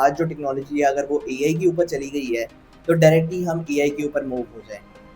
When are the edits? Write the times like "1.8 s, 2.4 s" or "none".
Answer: none